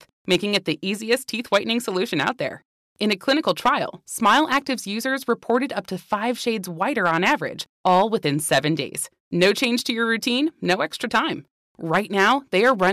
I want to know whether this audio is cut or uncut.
uncut